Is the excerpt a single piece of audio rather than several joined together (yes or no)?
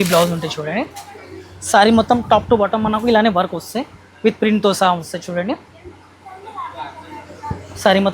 yes